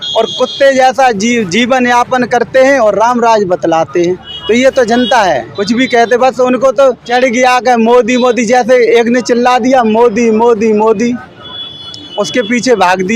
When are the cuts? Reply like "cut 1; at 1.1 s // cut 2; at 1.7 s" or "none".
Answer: cut 1; at 4.3 s // cut 2; at 5.5 s // cut 3; at 7.0 s

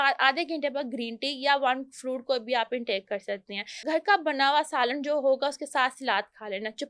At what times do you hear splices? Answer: cut 1; at 3.7 s

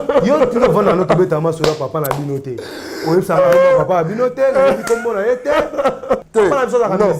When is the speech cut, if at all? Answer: cut 1; at 6.2 s

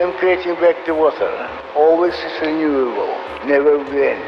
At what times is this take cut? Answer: cut 1; at 1.5 s

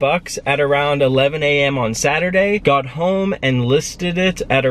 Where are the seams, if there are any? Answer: cut 1; at 2.6 s

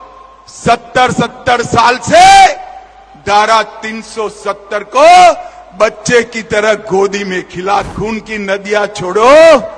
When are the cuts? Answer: cut 1; at 7.9 s

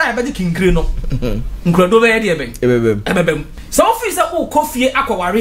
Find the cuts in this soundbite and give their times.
cut 1; at 3.6 s

